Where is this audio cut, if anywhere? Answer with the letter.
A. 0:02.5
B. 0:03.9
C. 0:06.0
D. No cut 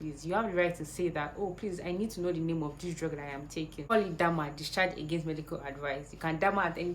B